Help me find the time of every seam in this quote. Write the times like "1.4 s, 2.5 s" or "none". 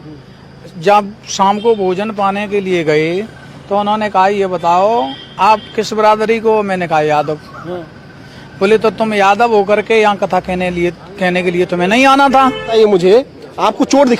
12.7 s

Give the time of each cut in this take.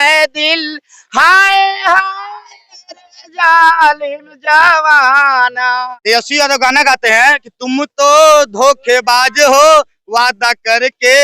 5.9 s

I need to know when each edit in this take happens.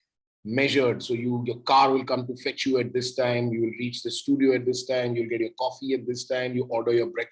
none

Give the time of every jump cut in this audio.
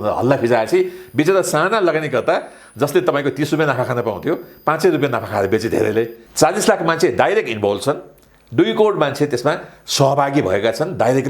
6.2 s

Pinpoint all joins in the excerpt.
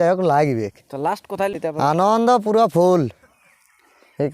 1.6 s

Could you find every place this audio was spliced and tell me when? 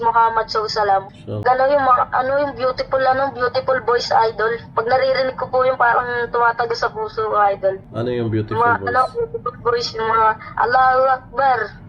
1.4 s

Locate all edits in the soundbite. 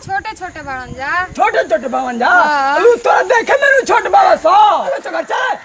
4.7 s

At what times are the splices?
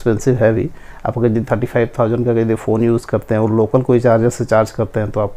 none

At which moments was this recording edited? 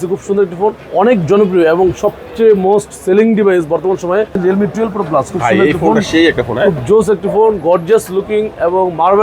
4.4 s

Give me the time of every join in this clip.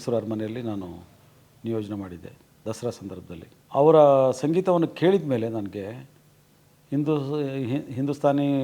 3.5 s

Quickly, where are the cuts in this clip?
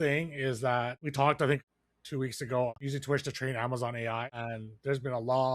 1.0 s, 1.6 s, 2.7 s, 4.4 s

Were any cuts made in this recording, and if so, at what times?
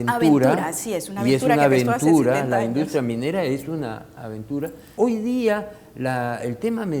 4.8 s

